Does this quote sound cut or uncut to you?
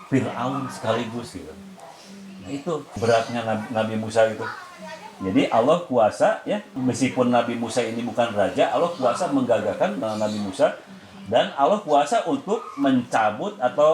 cut